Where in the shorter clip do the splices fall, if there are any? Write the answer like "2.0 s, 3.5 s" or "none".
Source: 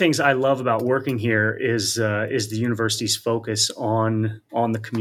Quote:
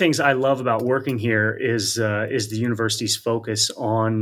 none